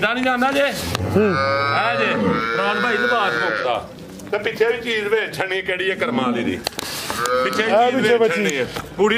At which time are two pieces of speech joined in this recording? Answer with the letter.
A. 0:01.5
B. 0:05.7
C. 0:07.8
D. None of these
D